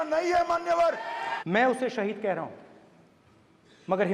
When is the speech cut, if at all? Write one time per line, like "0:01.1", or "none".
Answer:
0:01.3